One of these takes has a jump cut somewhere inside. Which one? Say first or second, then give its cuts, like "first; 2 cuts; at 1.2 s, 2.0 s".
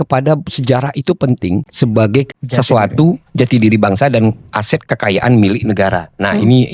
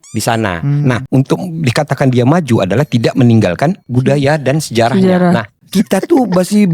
second; 2 cuts; at 1.1 s, 5.6 s